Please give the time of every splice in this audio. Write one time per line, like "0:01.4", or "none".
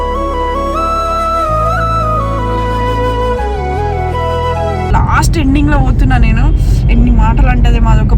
0:04.9